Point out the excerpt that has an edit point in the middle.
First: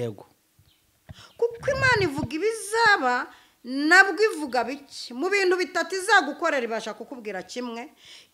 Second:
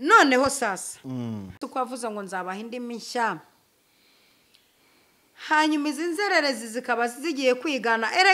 second; 1 cut; at 1.6 s

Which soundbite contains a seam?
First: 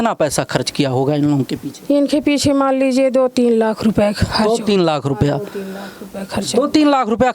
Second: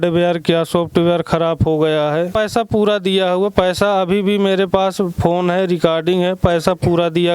second; 1 cut; at 2.3 s

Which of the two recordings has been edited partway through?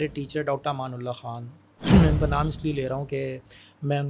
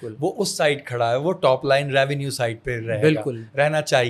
first; 1 cut; at 1.7 s

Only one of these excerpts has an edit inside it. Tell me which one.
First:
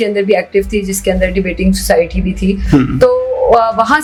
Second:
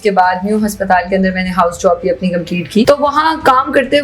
second; 1 cut; at 2.9 s

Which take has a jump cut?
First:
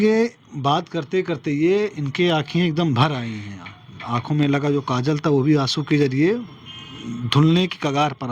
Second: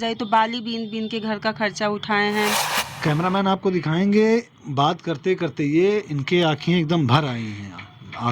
second; 1 cut; at 2.8 s

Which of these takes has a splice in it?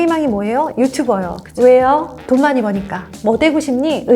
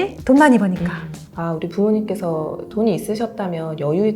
second; 1 cut; at 1.1 s

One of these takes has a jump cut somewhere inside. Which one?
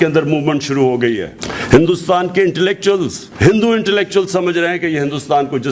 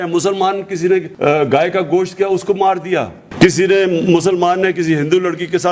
second; 1 cut; at 1.1 s

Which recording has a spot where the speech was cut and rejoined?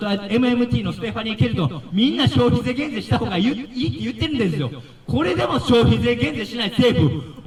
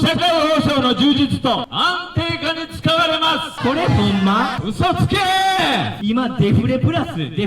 second; 4 cuts; at 1.7 s, 3.5 s, 4.6 s, 5.9 s

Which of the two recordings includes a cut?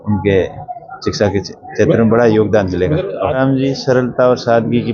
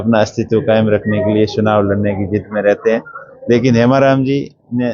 first; 1 cut; at 3.4 s

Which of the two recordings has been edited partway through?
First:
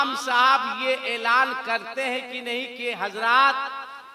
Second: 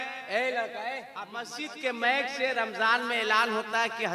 second; 1 cut; at 1.6 s

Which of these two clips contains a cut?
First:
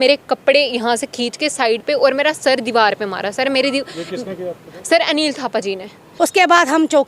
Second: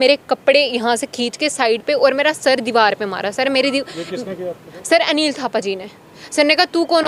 first; 1 cut; at 6.0 s

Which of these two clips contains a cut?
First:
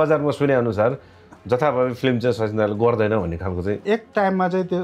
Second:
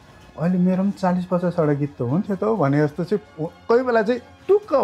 first; 1 cut; at 3.8 s

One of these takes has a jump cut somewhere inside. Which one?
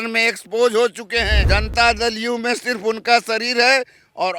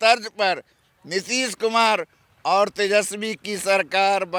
first; 1 cut; at 1.4 s

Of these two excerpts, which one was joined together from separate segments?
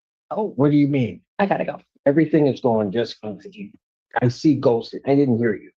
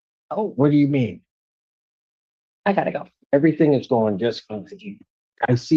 first; 1 cut; at 1.2 s

